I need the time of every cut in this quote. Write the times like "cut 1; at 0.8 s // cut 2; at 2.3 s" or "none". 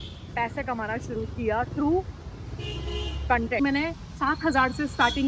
cut 1; at 3.6 s